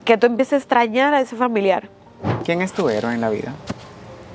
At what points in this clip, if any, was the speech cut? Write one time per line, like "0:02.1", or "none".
0:02.4